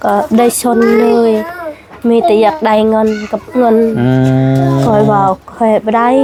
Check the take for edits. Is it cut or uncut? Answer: uncut